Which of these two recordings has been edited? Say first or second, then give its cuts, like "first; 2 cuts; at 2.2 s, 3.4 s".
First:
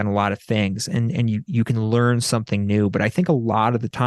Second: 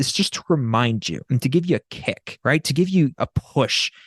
second; 3 cuts; at 1.2 s, 2.3 s, 3.2 s